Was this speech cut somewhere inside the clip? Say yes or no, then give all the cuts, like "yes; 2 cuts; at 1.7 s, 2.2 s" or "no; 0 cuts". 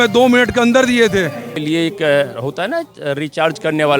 yes; 1 cut; at 1.5 s